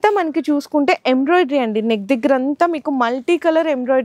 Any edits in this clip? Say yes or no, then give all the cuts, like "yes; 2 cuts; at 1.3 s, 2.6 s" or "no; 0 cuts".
no; 0 cuts